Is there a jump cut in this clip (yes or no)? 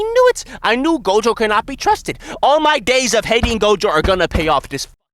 no